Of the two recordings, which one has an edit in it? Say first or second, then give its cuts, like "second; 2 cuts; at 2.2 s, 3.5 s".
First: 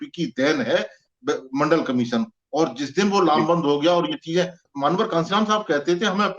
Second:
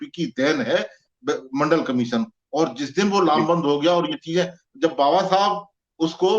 first; 1 cut; at 4.6 s